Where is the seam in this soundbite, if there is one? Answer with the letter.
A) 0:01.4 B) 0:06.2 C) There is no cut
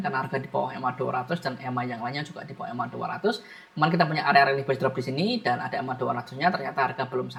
C